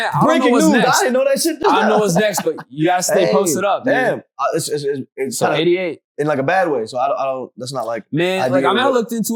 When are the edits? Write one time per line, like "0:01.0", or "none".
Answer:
none